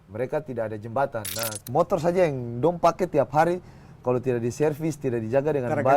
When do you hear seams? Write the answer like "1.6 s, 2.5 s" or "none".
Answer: 1.5 s